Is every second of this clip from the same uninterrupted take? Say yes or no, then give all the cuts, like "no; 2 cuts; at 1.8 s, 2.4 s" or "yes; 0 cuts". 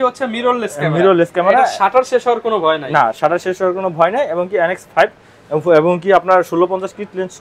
yes; 0 cuts